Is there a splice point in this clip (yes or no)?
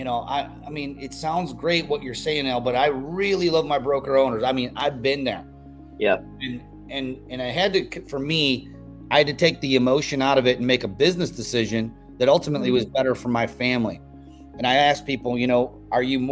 no